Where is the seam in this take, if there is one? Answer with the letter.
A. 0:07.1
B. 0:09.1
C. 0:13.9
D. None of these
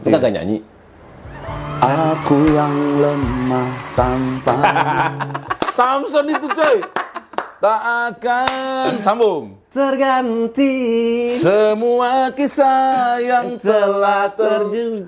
D